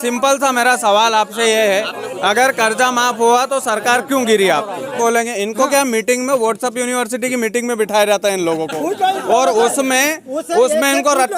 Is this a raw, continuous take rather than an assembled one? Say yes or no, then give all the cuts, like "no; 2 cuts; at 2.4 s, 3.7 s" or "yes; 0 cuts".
no; 1 cut; at 5.0 s